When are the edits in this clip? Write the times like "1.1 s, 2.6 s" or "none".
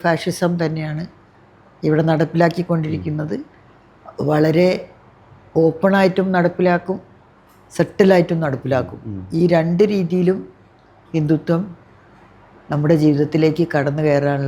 none